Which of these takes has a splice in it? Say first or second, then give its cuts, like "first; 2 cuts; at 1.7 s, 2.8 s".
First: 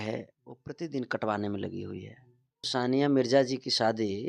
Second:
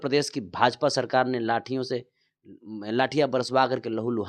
first; 1 cut; at 2.7 s